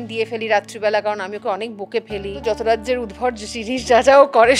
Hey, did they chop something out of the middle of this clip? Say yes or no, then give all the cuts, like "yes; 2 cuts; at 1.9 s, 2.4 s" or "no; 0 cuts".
yes; 1 cut; at 2.4 s